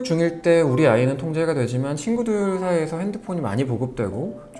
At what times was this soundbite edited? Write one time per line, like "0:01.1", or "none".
none